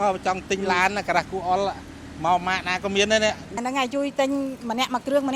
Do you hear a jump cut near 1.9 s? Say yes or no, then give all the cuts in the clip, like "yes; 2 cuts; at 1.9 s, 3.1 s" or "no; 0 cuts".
no; 1 cut; at 3.8 s